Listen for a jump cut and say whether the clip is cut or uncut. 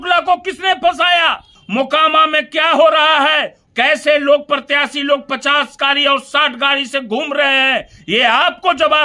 cut